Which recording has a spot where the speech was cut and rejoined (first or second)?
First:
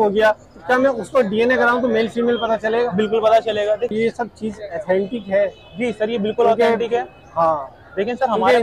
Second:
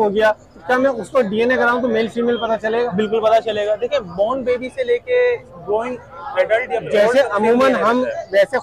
first